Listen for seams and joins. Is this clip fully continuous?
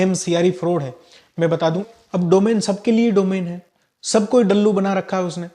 no; 1 cut; at 1.9 s

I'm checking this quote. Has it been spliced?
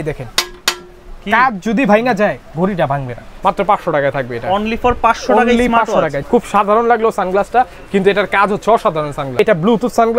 yes; 3 cuts; at 3.3 s, 6.2 s, 9.4 s

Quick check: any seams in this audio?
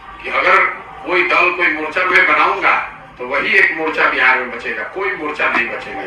no; 0 cuts

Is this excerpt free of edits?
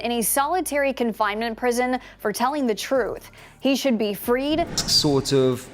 no; 1 cut; at 4.8 s

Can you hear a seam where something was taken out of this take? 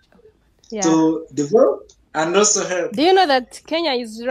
yes; 1 cut; at 2.7 s

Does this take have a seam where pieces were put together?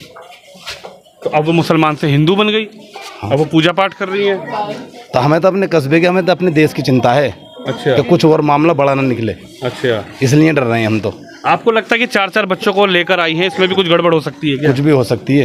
no; 0 cuts

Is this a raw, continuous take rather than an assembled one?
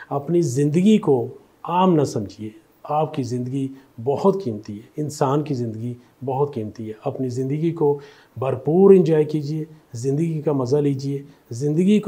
yes; 0 cuts

